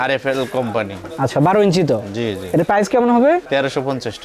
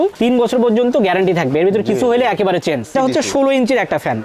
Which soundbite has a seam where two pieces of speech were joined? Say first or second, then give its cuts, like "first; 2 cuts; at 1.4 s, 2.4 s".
second; 1 cut; at 2.9 s